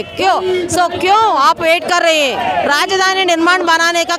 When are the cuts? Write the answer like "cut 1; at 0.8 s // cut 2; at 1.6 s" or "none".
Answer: none